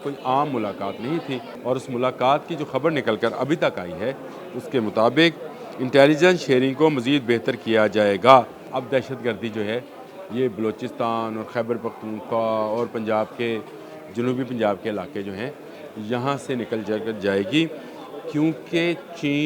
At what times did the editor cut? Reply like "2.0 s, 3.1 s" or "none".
1.5 s, 8.7 s